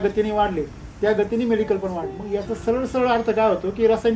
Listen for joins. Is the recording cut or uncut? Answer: cut